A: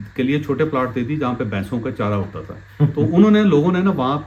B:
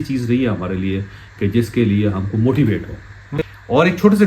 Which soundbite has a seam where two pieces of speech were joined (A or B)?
B